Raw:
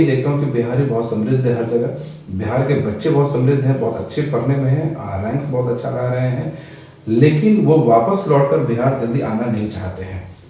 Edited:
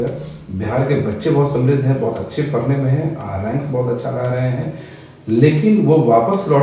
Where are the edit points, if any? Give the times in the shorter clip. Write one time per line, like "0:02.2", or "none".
none